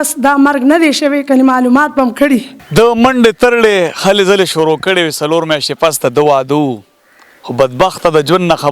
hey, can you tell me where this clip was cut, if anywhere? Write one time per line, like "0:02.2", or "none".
0:02.6